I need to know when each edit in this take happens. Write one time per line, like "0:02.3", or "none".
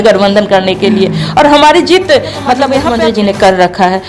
0:02.9